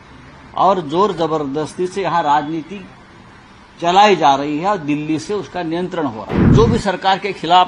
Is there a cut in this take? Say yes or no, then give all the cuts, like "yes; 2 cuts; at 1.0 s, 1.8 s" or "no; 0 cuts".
yes; 1 cut; at 6.5 s